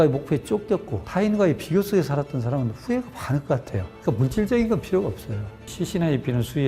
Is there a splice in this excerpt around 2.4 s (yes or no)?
no